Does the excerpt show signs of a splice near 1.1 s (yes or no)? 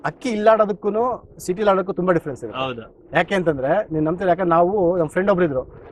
no